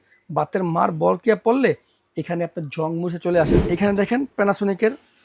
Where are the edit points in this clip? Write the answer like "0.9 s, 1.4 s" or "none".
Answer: 3.6 s